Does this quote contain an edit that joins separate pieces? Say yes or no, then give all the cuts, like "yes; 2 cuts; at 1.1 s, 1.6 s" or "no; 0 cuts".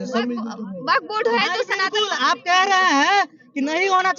no; 0 cuts